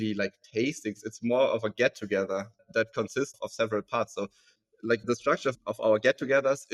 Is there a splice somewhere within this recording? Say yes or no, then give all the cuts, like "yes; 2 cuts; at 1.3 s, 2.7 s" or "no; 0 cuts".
no; 0 cuts